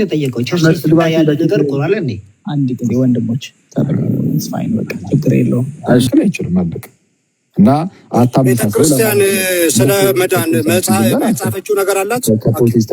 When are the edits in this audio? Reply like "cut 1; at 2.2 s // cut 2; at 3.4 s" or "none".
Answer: cut 1; at 6.1 s